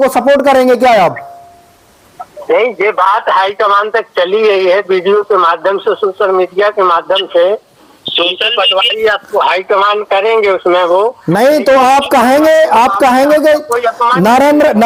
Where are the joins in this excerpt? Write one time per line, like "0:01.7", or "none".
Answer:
none